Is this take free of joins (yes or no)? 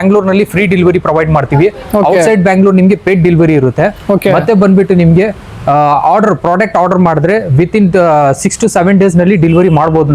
yes